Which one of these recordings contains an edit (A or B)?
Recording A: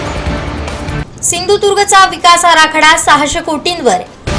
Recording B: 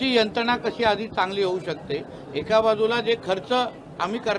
A